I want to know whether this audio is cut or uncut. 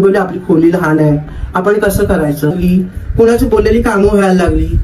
cut